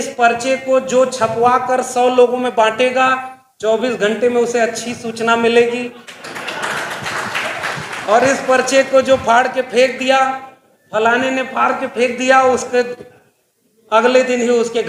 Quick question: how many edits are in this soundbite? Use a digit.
0